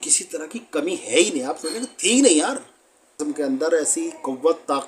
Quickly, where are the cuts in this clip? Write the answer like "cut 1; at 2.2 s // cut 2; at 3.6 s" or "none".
cut 1; at 3.2 s